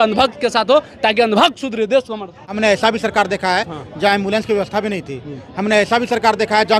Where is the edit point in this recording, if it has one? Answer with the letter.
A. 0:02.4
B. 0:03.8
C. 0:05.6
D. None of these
A